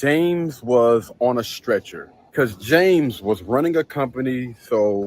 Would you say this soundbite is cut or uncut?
cut